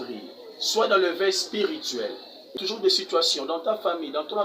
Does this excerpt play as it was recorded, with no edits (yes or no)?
no